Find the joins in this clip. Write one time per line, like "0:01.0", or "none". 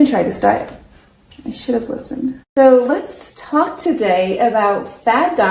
0:02.4